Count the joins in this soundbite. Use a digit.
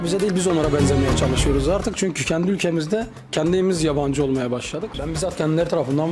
1